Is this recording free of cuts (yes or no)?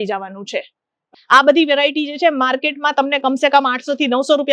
no